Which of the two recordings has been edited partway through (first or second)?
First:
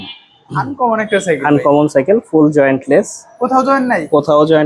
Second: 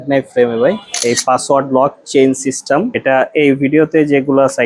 second